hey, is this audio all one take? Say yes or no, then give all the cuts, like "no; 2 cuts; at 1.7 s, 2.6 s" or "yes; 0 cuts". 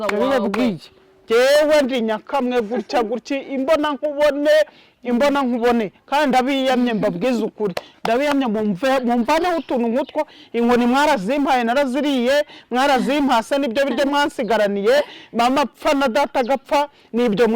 yes; 0 cuts